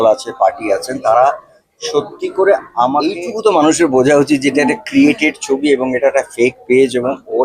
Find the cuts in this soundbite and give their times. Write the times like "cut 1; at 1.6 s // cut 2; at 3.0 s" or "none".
cut 1; at 3.1 s

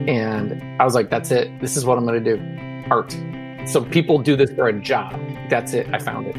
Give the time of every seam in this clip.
cut 1; at 1.6 s // cut 2; at 3.0 s

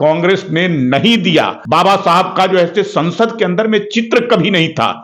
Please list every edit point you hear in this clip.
cut 1; at 1.6 s

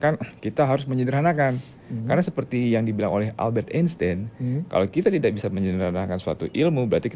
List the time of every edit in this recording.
none

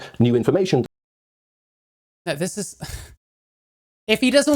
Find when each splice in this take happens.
none

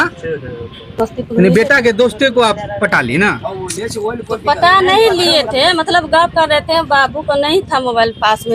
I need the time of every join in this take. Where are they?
cut 1; at 1.0 s

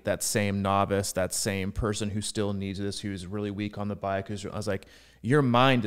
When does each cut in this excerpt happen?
none

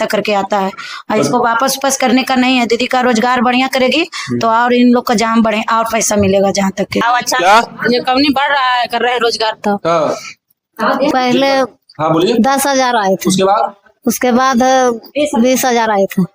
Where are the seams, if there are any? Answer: cut 1; at 7.0 s // cut 2; at 11.1 s

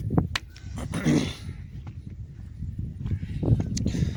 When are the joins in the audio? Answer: none

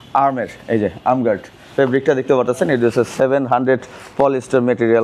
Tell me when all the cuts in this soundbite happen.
cut 1; at 1.6 s

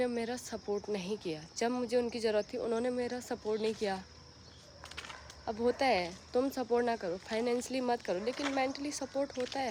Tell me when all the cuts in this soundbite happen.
none

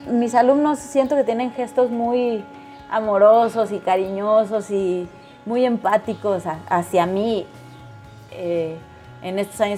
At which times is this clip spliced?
none

